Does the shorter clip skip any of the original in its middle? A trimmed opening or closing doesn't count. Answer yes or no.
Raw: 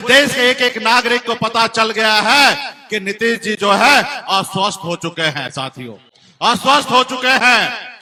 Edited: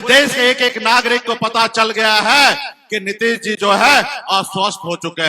no